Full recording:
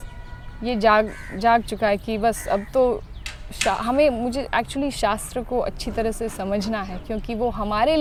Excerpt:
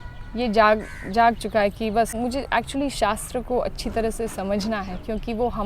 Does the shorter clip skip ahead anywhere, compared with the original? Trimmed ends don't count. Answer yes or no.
yes